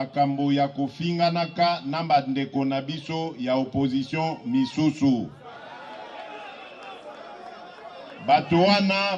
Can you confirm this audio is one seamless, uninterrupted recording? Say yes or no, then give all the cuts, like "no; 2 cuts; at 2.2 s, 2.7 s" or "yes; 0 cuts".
yes; 0 cuts